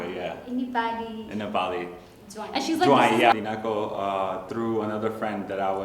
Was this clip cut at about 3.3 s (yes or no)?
yes